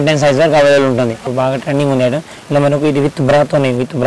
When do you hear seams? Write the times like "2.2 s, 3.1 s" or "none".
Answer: 1.2 s